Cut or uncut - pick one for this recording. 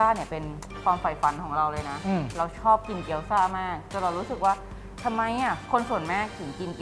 uncut